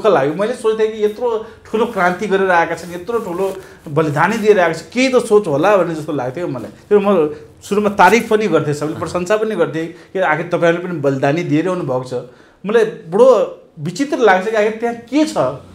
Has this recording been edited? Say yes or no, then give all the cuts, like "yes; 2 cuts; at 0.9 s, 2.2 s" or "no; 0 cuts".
no; 0 cuts